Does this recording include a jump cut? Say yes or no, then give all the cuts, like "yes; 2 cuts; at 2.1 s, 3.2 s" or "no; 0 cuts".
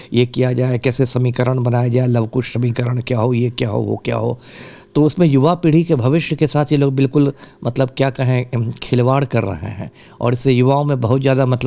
no; 0 cuts